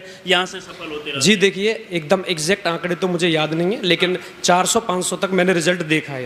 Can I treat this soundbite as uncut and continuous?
yes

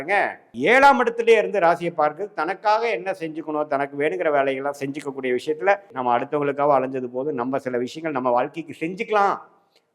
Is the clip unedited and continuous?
no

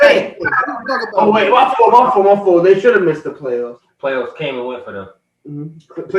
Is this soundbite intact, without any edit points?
no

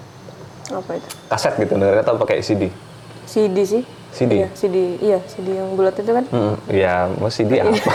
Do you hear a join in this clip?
no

